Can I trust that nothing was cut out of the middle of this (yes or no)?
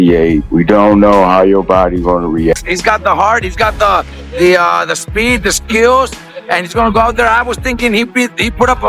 no